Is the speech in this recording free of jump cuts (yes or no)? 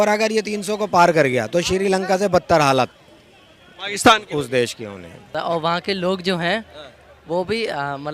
no